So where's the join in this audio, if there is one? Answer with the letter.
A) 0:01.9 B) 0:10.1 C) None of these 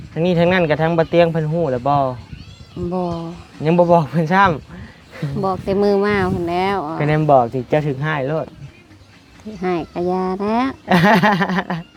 C